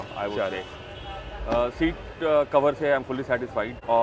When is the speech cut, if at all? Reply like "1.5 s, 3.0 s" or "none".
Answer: none